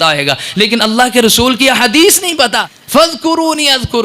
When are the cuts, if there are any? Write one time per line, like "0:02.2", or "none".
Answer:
0:02.7

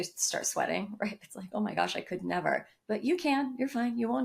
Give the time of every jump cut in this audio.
none

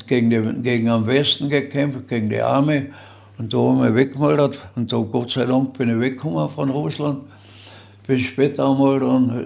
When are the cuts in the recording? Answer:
none

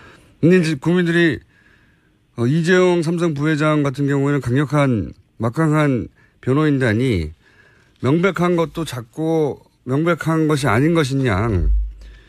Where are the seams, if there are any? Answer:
0:11.0

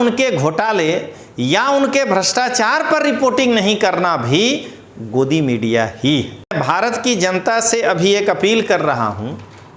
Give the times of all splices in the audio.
0:06.5

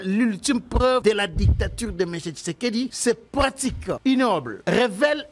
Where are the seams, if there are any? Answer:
0:01.0
0:03.0
0:04.0

